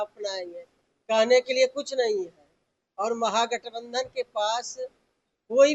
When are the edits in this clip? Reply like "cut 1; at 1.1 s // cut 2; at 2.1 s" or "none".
none